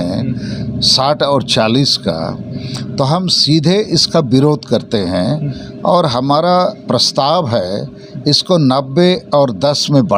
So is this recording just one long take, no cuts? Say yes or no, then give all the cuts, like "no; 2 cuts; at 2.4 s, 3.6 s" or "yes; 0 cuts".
yes; 0 cuts